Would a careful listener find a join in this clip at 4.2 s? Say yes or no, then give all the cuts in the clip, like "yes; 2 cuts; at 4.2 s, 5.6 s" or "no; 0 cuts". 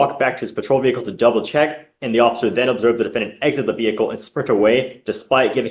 no; 0 cuts